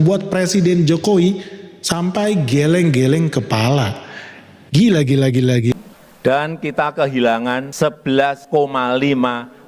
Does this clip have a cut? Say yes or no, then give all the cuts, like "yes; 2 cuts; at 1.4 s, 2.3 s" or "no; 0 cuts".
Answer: yes; 1 cut; at 5.7 s